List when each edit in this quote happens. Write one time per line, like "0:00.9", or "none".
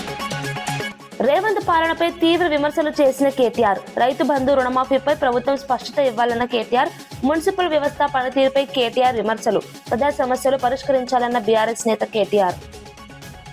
0:01.0